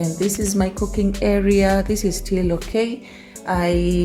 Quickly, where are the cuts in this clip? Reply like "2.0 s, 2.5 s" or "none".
none